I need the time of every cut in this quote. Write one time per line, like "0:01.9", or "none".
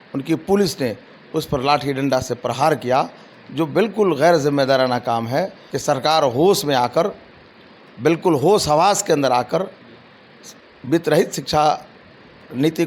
0:05.6